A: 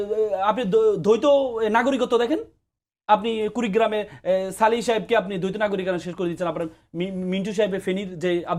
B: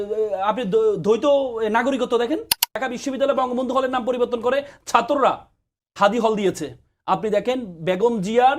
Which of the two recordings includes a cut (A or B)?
B